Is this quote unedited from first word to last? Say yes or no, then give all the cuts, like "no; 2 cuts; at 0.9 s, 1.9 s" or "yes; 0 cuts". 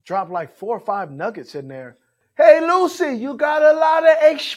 no; 1 cut; at 2.2 s